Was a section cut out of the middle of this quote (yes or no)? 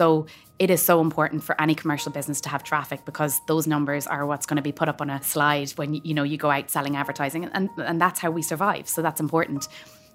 yes